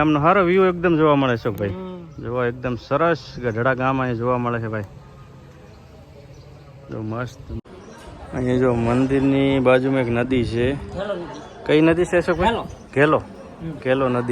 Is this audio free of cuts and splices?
no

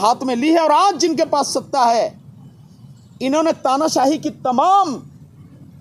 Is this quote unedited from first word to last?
yes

